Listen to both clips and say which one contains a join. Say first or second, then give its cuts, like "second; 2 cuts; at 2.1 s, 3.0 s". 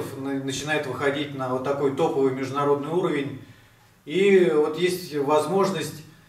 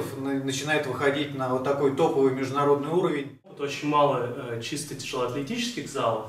second; 1 cut; at 3.7 s